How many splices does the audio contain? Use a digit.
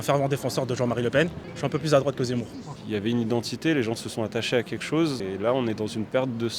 3